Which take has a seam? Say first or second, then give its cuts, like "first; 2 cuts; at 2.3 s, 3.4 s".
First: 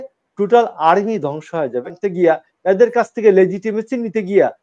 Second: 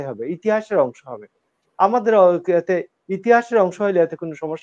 first; 1 cut; at 2.0 s